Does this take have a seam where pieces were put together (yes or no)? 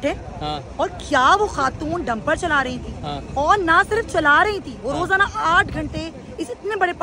no